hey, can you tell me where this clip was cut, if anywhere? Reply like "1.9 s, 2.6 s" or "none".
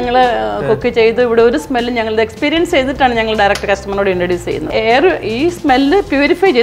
4.7 s